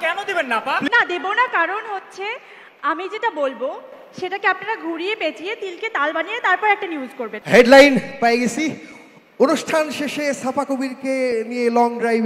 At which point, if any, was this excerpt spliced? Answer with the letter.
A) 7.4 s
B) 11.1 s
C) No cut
A